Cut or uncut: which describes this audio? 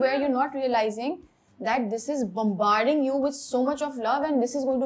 uncut